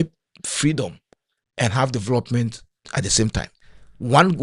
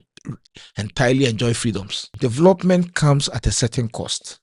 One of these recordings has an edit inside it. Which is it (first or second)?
second